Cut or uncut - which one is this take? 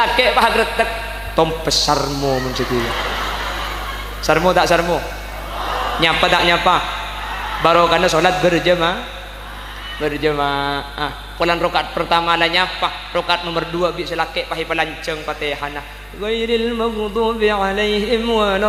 uncut